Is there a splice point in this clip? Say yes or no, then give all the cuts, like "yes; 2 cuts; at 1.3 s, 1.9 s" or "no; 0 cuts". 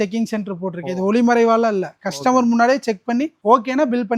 no; 0 cuts